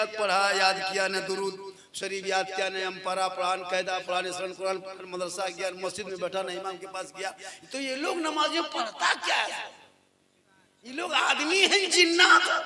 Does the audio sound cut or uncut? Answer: uncut